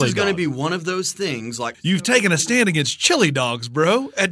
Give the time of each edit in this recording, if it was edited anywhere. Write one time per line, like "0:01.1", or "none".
0:01.8